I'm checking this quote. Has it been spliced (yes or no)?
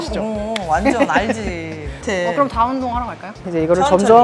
yes